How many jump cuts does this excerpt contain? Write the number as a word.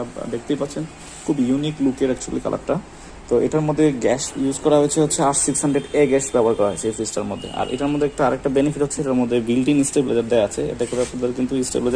zero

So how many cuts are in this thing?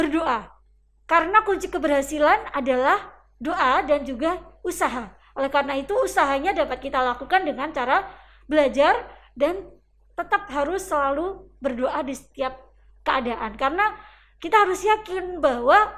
zero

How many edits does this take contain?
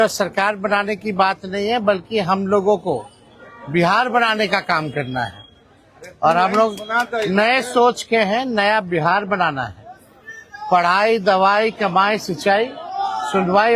zero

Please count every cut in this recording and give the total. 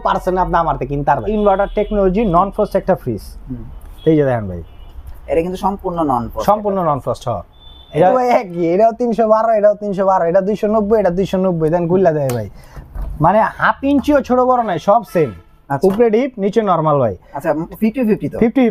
two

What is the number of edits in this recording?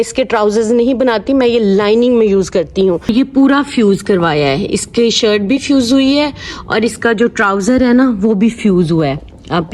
one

